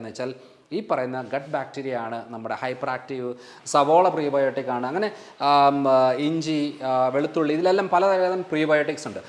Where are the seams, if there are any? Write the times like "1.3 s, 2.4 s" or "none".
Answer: 3.5 s